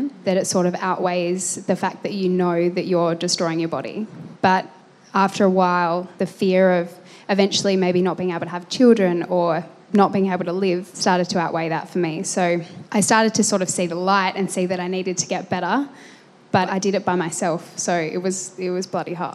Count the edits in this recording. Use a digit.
2